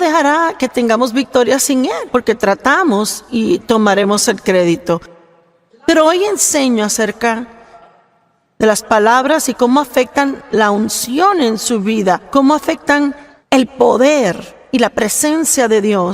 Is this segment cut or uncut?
cut